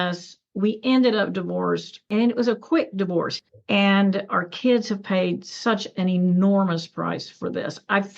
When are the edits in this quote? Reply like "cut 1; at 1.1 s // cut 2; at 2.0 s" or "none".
cut 1; at 2.0 s // cut 2; at 3.3 s